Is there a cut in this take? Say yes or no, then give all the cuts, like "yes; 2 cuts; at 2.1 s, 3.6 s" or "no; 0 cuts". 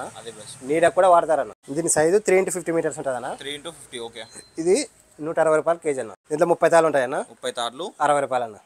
yes; 2 cuts; at 1.6 s, 6.1 s